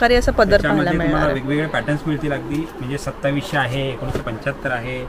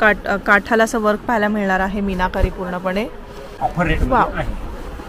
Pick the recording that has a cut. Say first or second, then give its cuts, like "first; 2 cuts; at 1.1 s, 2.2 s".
second; 1 cut; at 3.4 s